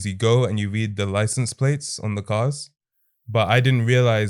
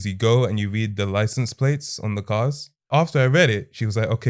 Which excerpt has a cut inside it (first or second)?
second